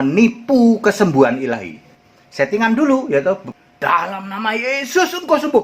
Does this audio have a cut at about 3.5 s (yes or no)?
yes